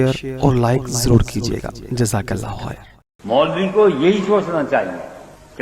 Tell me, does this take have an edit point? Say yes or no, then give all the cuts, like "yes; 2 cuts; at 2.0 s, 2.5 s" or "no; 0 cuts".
yes; 1 cut; at 3.0 s